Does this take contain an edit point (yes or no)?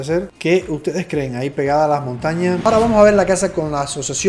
yes